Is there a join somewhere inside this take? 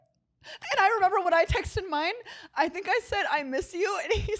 no; 0 cuts

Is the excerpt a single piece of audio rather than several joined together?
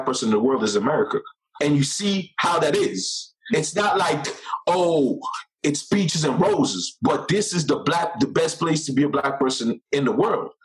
no; 2 cuts; at 1.4 s, 3.4 s

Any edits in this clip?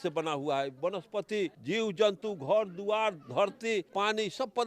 yes; 2 cuts; at 1.6 s, 3.9 s

